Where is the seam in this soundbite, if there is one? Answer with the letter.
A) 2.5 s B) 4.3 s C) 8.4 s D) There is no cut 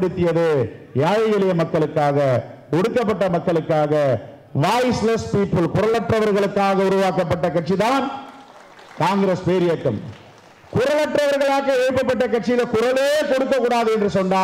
D